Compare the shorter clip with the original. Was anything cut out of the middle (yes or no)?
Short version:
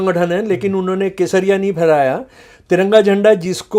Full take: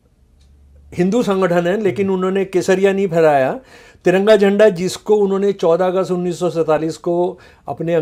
no